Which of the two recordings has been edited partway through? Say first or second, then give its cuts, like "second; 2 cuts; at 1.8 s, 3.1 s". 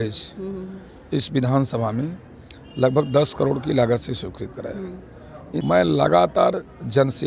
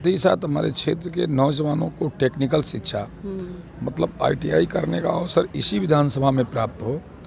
first; 1 cut; at 5.6 s